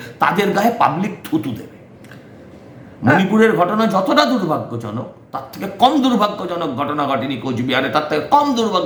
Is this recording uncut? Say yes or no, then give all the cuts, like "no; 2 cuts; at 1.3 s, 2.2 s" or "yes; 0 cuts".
yes; 0 cuts